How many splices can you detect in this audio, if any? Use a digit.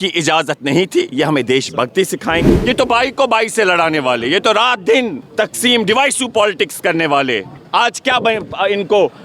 2